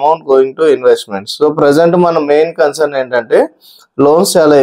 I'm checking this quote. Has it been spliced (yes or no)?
no